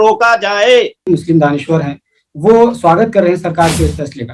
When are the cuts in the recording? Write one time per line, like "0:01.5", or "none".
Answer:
0:01.0